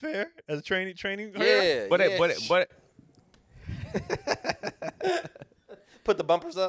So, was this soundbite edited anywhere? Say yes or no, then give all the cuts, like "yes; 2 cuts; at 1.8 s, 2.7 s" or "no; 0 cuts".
no; 0 cuts